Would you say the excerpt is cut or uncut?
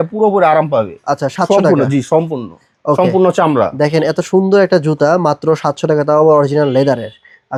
uncut